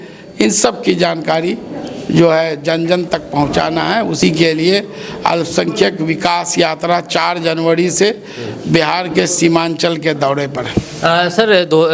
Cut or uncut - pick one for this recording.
uncut